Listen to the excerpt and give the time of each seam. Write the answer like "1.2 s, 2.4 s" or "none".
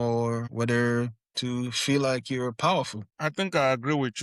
3.1 s